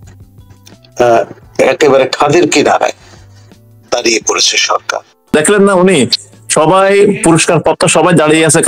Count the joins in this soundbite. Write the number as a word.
one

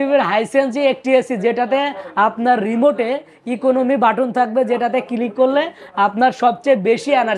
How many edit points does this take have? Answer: zero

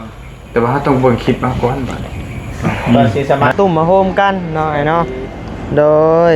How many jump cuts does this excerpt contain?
one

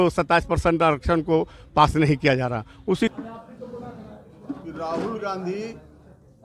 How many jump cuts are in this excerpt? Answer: one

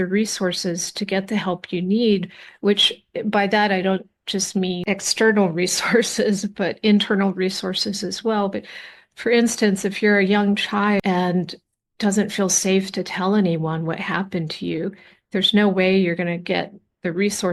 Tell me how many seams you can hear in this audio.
zero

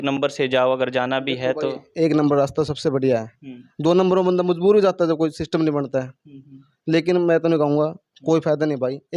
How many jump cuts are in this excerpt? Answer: zero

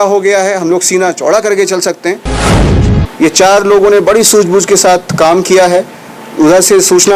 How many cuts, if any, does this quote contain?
one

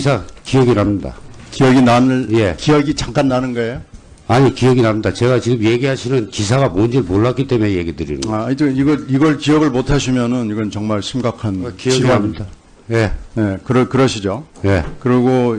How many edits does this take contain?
zero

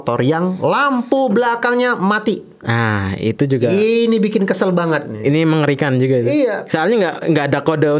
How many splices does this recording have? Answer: zero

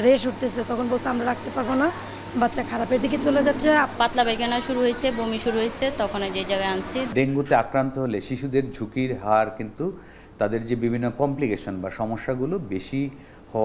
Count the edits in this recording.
two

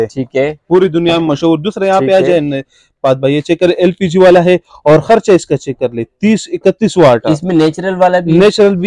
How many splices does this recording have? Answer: zero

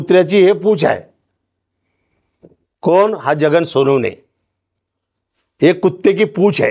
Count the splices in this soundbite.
zero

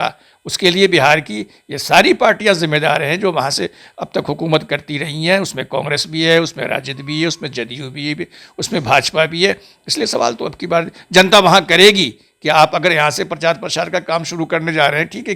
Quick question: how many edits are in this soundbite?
zero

